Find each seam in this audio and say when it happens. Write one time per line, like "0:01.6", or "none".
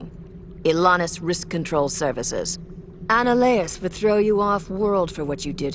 0:02.6

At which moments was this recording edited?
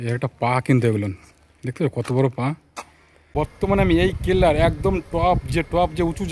0:03.3

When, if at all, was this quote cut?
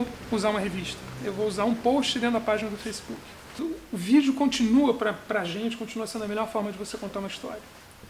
0:03.5

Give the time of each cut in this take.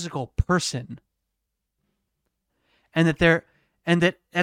none

